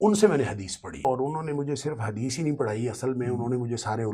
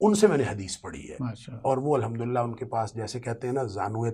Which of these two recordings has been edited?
first; 1 cut; at 1.0 s

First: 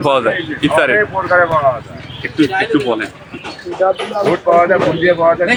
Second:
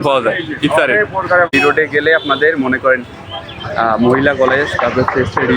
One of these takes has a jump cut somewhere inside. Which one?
second; 1 cut; at 1.5 s

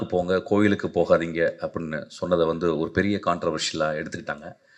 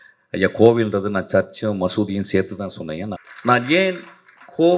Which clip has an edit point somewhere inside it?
second; 1 cut; at 3.1 s

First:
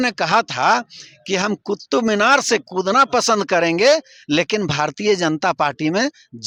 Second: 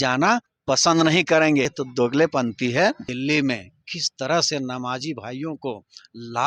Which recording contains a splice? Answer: second; 2 cuts; at 1.8 s, 3.1 s

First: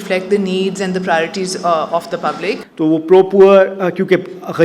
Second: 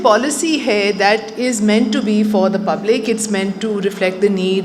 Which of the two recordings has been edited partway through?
first; 1 cut; at 2.6 s

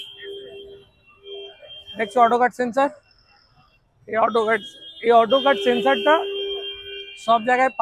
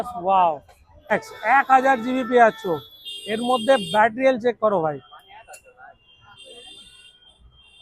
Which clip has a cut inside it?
second; 1 cut; at 1.1 s

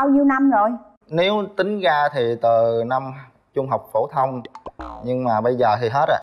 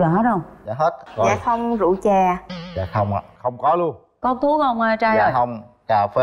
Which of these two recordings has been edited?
second; 1 cut; at 1.0 s

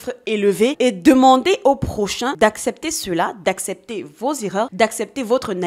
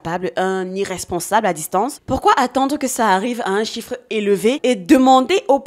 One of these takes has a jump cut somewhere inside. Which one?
second; 1 cut; at 2.0 s

